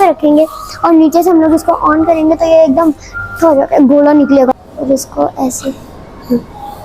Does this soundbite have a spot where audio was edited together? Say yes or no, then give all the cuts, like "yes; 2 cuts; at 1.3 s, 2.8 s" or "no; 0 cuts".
yes; 1 cut; at 4.5 s